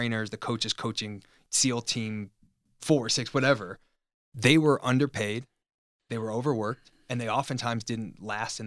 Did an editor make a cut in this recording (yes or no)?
yes